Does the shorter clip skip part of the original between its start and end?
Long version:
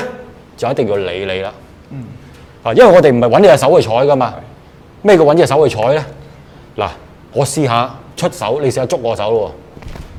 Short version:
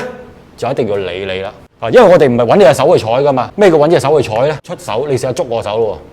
yes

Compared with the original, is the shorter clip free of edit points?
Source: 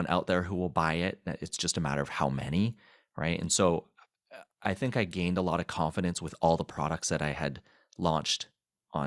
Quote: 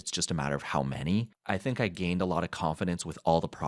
no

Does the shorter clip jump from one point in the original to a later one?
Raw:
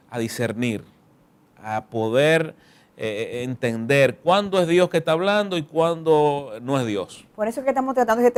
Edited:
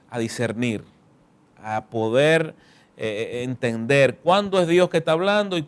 no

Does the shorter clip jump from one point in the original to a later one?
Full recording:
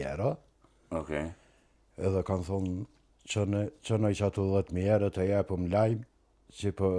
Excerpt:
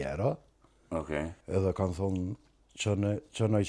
yes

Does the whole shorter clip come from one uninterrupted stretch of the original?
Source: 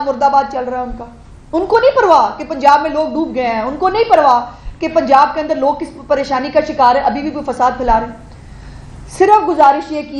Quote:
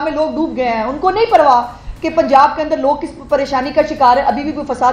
yes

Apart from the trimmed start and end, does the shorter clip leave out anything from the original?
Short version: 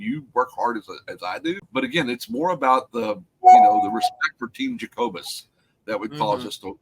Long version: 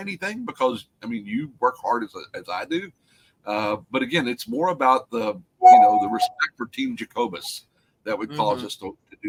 yes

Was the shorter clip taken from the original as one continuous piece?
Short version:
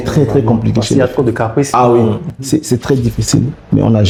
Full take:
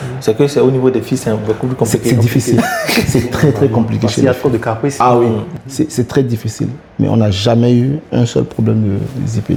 yes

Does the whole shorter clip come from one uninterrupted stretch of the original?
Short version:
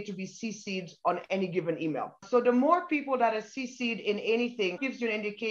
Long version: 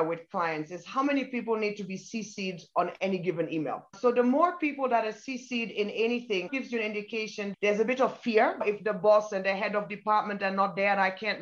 yes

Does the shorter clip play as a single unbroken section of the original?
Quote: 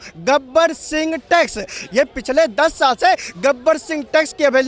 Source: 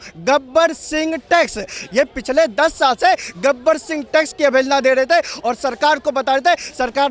yes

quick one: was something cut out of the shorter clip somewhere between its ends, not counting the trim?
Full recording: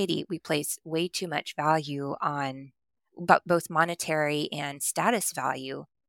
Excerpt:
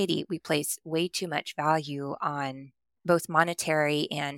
yes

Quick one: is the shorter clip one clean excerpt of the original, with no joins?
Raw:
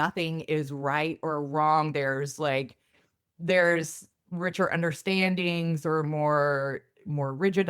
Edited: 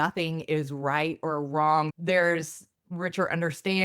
no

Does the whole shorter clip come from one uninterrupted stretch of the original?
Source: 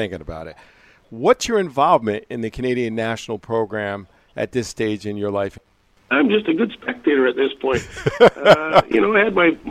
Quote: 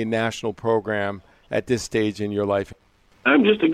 yes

